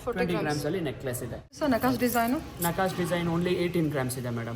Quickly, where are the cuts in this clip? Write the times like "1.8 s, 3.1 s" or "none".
1.5 s